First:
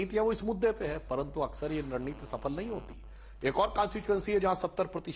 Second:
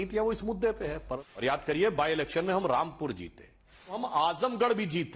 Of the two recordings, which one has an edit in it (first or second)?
second